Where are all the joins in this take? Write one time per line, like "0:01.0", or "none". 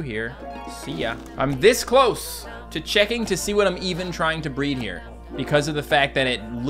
0:05.3